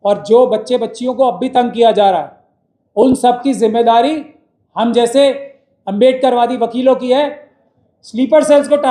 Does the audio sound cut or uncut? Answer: cut